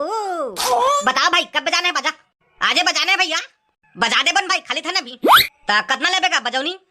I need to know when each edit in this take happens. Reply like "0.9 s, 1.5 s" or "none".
1.0 s